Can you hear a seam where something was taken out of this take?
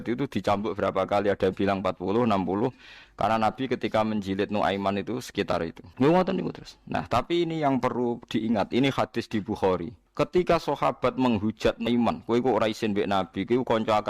yes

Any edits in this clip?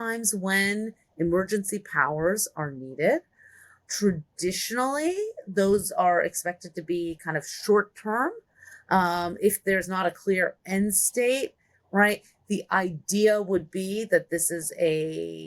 no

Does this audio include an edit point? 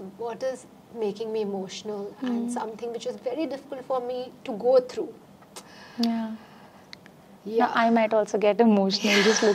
no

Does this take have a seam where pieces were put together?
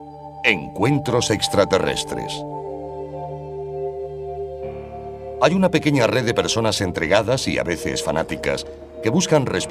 no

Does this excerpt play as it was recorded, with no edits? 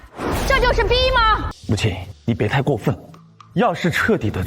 no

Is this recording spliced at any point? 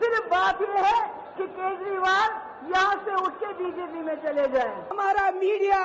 yes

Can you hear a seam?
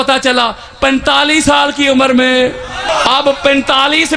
yes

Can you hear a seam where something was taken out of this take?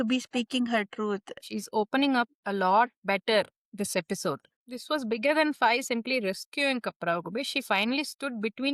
yes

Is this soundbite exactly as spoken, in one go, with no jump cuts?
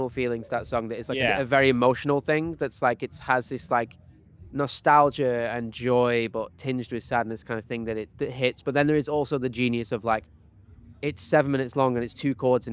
yes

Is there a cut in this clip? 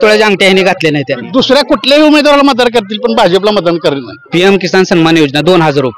yes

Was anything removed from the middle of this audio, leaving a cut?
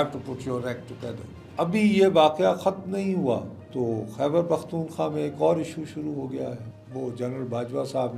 yes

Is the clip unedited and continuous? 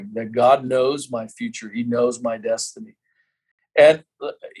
yes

